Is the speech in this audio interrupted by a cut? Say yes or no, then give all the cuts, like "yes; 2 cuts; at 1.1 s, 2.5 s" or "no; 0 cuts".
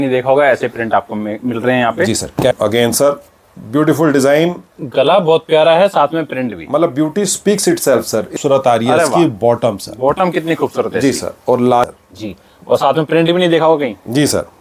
yes; 3 cuts; at 2.5 s, 8.3 s, 11.8 s